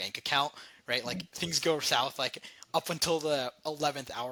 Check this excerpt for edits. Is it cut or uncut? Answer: uncut